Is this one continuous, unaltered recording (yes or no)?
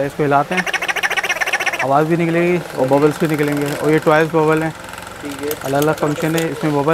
yes